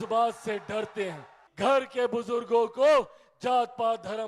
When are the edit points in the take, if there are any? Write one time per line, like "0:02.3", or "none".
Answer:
0:01.4